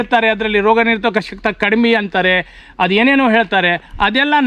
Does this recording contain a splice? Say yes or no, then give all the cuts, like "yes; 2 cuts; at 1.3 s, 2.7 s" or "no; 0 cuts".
no; 0 cuts